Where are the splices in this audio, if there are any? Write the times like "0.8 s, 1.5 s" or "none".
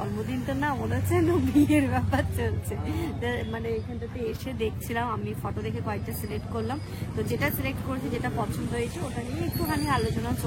none